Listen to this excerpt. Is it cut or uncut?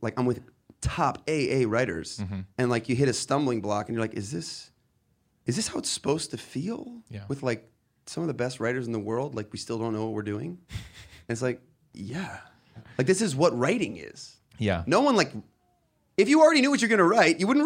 cut